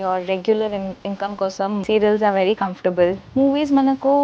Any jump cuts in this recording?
yes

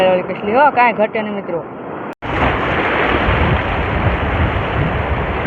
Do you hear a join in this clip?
yes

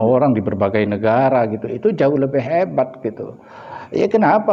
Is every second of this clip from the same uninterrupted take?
yes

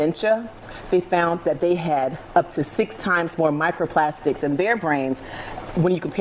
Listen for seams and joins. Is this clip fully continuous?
yes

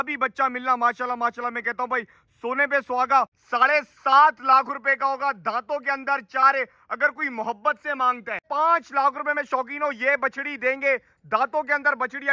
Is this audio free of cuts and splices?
no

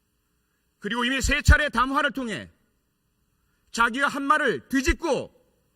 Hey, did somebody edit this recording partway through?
yes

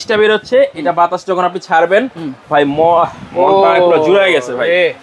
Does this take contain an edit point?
no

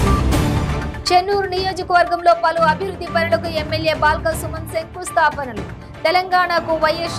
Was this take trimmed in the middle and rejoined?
yes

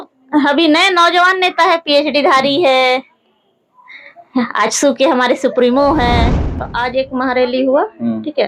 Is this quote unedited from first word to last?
no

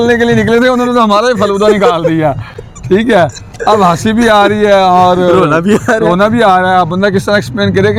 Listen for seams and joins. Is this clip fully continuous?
yes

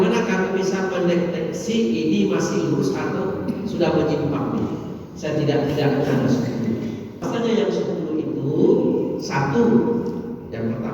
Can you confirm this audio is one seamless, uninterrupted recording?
no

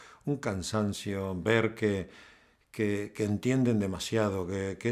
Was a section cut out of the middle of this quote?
no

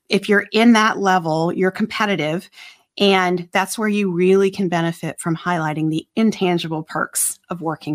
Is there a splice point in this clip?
no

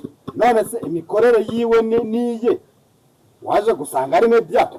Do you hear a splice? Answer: no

